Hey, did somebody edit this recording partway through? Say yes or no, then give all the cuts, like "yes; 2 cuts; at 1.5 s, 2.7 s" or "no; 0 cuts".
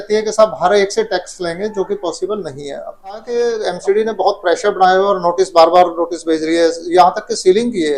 yes; 1 cut; at 3.2 s